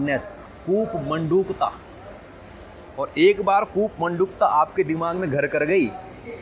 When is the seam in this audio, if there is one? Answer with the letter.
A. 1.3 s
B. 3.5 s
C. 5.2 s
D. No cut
D